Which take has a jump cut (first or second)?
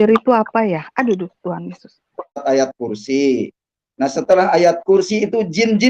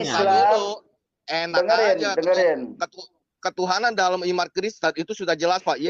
first